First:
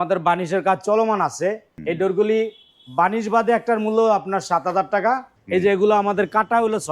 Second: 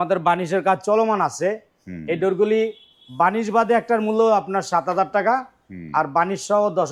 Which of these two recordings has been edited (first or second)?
first